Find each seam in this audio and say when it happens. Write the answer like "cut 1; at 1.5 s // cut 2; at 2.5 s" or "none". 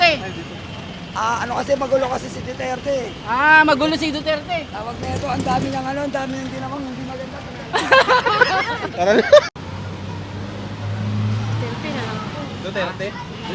cut 1; at 9.5 s

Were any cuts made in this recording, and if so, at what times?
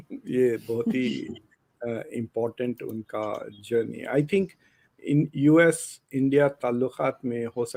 none

